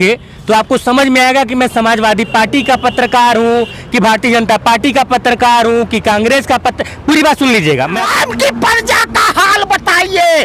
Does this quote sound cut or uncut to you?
cut